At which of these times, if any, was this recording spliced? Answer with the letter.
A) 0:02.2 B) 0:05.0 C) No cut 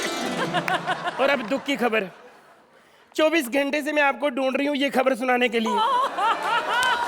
C